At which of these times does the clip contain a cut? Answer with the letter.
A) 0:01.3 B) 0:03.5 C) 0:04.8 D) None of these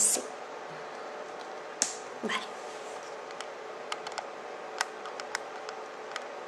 B